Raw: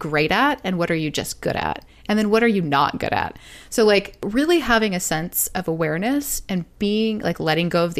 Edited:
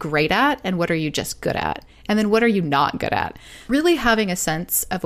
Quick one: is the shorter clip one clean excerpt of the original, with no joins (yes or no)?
no